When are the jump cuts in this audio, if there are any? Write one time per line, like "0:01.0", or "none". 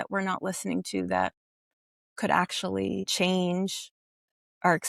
0:03.1